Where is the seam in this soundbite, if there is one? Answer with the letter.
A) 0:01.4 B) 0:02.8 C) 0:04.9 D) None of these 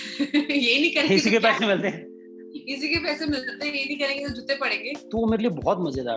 C